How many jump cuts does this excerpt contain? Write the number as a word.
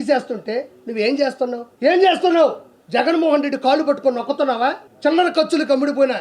two